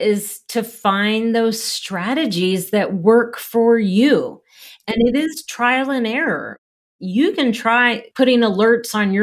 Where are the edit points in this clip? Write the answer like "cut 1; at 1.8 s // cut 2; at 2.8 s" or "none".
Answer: cut 1; at 6.8 s // cut 2; at 8.0 s

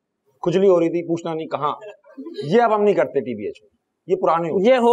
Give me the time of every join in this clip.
none

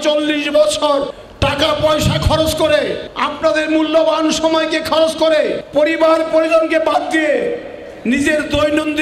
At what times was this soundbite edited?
cut 1; at 1.1 s // cut 2; at 3.3 s // cut 3; at 5.4 s

